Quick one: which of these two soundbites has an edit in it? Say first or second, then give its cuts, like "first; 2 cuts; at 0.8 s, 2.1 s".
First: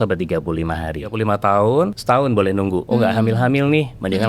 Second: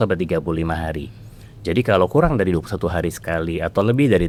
first; 3 cuts; at 1.1 s, 2.0 s, 2.8 s